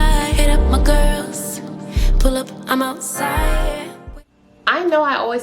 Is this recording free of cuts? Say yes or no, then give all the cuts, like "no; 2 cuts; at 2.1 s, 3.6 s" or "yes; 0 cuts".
no; 1 cut; at 3.9 s